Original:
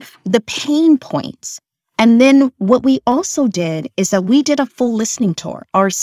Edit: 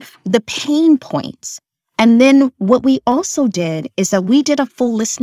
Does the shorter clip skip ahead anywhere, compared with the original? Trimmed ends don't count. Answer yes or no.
no